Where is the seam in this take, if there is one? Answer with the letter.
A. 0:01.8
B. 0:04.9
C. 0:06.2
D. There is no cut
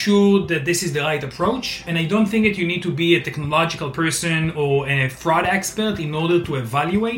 A